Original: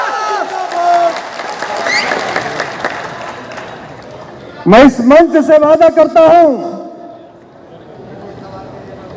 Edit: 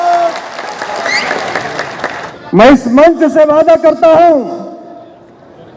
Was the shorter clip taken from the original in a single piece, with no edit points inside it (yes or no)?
no